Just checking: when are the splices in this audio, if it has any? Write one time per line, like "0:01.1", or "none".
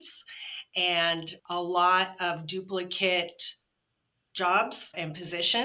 none